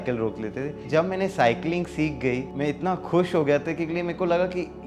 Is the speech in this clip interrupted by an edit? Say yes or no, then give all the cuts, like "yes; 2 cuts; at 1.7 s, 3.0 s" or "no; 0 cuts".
yes; 2 cuts; at 0.9 s, 2.5 s